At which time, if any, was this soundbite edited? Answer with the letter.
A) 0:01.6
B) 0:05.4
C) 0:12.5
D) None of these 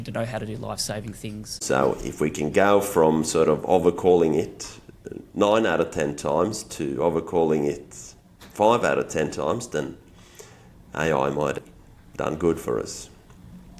A